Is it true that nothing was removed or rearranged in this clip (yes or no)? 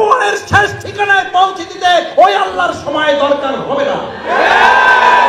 yes